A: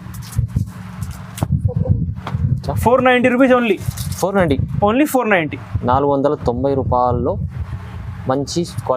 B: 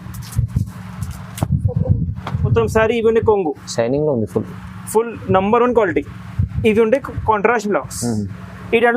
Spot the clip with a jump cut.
B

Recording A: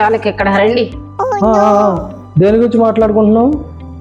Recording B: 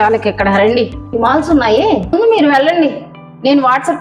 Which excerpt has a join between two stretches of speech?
B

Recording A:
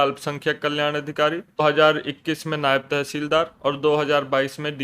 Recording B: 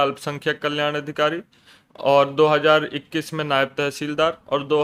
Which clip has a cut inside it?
A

